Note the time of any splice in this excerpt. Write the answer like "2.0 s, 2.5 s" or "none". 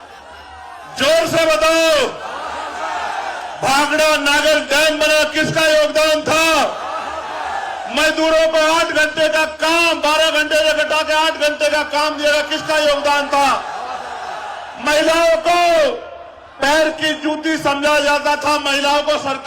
none